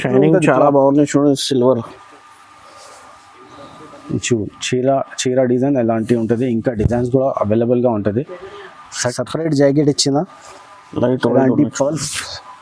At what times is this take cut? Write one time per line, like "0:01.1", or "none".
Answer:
0:09.1